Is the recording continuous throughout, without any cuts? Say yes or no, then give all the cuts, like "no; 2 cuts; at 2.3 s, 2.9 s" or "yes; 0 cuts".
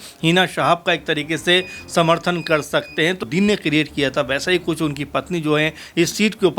no; 1 cut; at 3.2 s